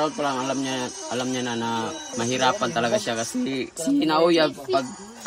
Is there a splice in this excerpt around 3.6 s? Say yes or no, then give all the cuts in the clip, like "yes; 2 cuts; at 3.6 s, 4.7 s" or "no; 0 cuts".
yes; 2 cuts; at 2.1 s, 3.6 s